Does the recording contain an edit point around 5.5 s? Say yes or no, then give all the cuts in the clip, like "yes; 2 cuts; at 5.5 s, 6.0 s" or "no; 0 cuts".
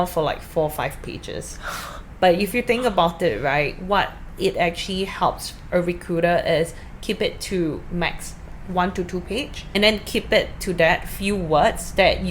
no; 1 cut; at 9.6 s